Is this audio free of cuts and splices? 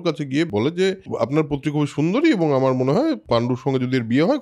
no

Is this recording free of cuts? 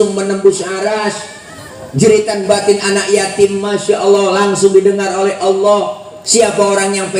yes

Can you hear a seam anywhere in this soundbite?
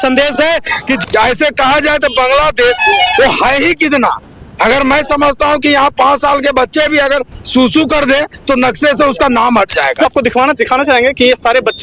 yes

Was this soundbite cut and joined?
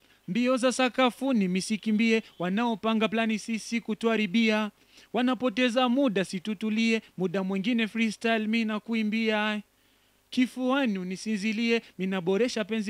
no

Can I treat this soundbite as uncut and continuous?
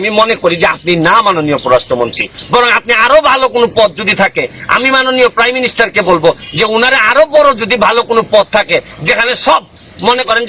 yes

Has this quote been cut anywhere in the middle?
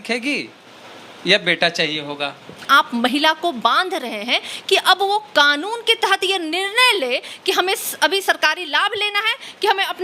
yes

